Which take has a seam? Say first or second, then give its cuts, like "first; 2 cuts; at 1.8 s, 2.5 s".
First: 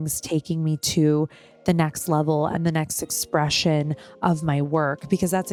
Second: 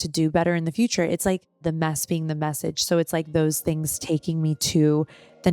second; 1 cut; at 1.6 s